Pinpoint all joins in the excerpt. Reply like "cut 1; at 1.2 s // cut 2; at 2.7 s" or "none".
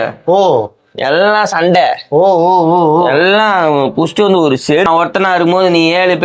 cut 1; at 4.9 s